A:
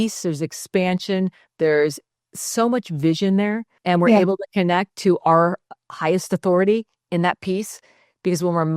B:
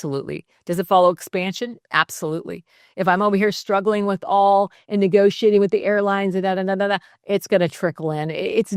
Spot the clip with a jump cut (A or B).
A